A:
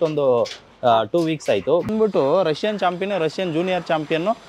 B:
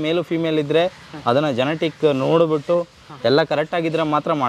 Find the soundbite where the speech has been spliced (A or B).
A